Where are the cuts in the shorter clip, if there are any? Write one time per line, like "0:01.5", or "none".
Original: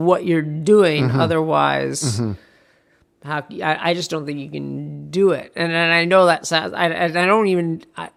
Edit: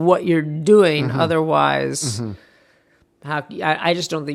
none